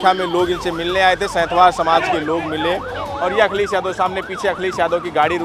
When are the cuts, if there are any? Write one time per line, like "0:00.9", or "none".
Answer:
none